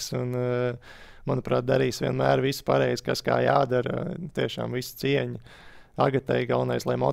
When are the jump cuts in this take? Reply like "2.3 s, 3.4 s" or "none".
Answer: none